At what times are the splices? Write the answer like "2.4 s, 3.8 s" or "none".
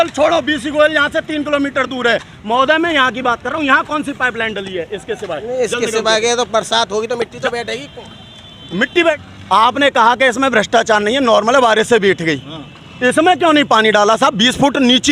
9.2 s